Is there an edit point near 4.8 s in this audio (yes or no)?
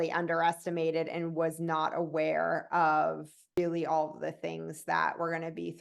no